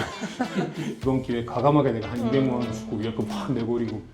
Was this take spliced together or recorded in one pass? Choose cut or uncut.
cut